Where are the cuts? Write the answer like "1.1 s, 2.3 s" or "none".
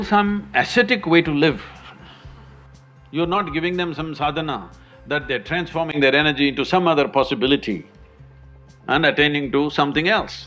none